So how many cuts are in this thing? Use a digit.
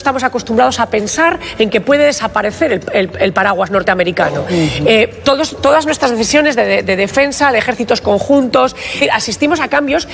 1